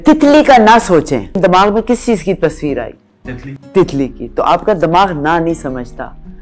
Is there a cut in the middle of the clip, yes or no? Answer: yes